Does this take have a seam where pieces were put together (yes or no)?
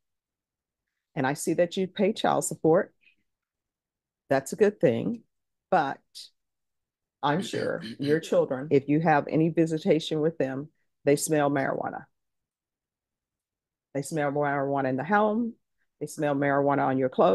yes